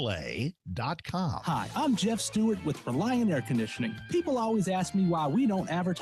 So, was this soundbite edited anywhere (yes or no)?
yes